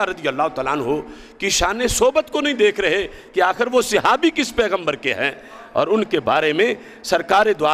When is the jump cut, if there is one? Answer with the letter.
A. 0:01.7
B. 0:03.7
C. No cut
C